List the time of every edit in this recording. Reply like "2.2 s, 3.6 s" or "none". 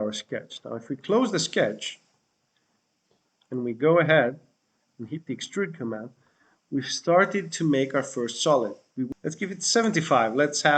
9.1 s